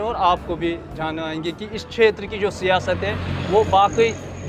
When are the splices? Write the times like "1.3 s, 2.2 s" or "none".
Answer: none

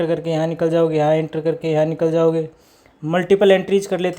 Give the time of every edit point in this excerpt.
none

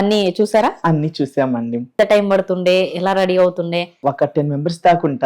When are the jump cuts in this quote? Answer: 1.9 s, 3.9 s

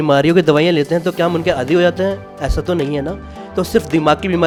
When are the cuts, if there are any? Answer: none

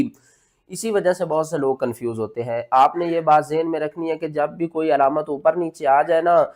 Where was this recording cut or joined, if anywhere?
none

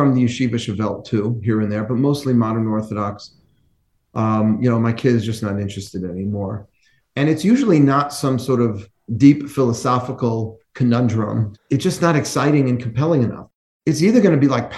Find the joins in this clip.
11.5 s, 13.4 s

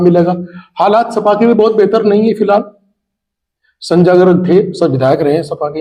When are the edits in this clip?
none

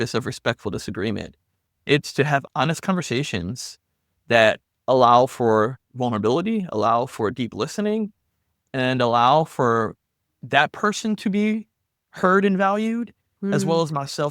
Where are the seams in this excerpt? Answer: 1.8 s

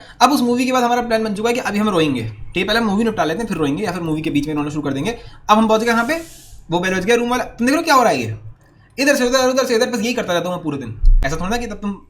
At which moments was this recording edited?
11.2 s

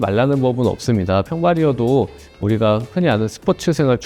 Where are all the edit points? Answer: none

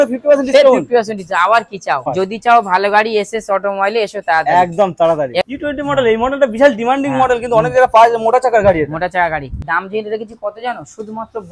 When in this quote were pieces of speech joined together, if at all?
2.1 s, 5.4 s, 9.6 s

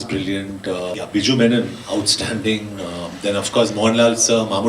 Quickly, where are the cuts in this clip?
1.0 s

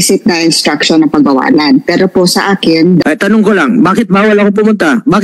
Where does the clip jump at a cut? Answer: 3.0 s

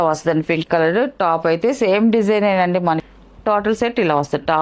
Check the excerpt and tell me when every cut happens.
3.0 s

